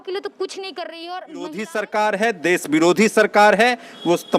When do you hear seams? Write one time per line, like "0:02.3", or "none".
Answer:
0:01.6